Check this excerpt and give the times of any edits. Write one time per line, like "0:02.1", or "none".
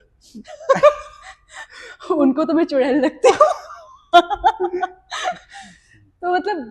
none